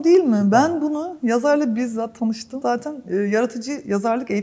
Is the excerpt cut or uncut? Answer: uncut